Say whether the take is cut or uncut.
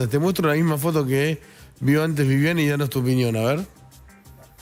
uncut